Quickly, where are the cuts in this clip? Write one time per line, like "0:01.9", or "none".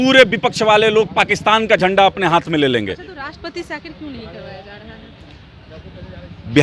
none